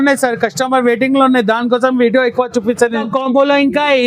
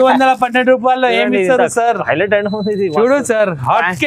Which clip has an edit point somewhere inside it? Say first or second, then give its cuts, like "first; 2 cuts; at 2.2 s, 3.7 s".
first; 1 cut; at 3.0 s